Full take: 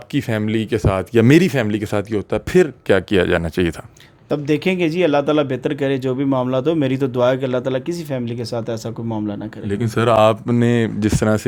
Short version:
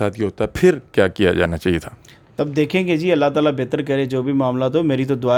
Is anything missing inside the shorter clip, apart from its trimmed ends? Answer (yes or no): no